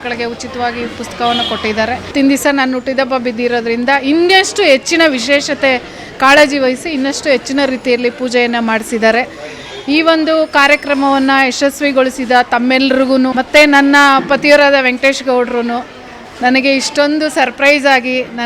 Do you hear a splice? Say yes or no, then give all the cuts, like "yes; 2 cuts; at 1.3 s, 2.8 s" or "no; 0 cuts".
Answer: yes; 2 cuts; at 2.1 s, 13.3 s